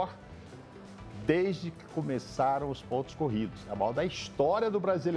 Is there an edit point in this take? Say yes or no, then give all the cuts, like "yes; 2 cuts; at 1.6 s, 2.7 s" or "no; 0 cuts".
no; 0 cuts